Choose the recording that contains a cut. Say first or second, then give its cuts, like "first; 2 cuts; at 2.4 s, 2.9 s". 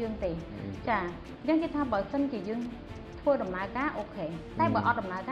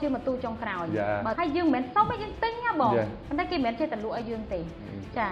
second; 2 cuts; at 1.3 s, 3.2 s